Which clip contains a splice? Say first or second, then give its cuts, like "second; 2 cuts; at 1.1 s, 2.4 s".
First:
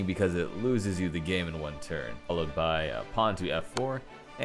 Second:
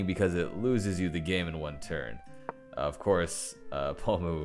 first; 1 cut; at 2.3 s